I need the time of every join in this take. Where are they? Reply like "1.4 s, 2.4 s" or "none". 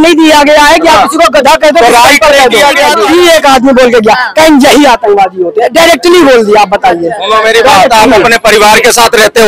3.0 s